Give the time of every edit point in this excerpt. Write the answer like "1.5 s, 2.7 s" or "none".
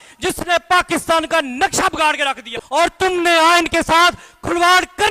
2.8 s